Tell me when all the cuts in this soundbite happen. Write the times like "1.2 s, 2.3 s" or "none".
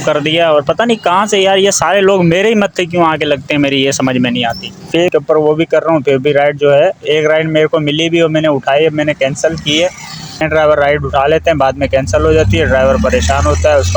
5.1 s, 10.4 s